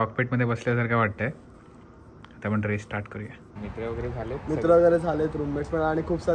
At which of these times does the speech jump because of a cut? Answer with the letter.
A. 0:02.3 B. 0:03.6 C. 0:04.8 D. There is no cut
B